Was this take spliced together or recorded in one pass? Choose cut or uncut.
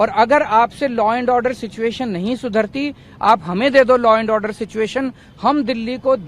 uncut